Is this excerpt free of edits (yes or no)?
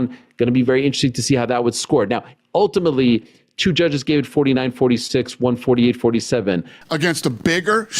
no